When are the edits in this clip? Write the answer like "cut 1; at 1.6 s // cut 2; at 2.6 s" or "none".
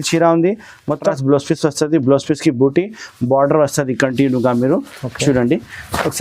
cut 1; at 1.1 s